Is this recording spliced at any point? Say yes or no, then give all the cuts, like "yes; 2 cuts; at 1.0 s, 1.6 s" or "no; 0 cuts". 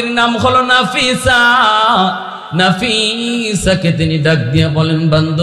no; 0 cuts